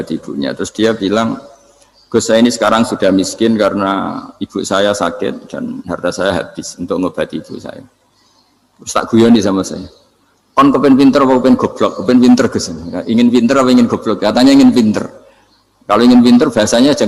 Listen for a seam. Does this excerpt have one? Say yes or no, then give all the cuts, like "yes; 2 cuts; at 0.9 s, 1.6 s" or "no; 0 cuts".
no; 0 cuts